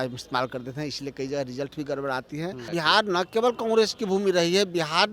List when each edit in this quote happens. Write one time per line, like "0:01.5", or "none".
0:02.6